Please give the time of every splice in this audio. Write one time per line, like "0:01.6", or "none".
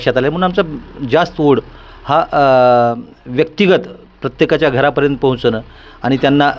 none